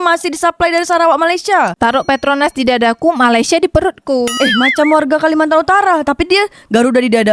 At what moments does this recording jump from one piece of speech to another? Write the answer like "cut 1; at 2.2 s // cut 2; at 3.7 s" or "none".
cut 1; at 1.7 s